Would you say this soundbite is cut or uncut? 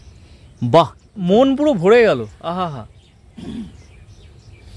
cut